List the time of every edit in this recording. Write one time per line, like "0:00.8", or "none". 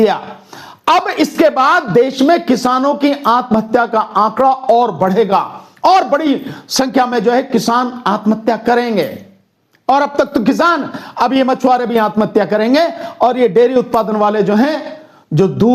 none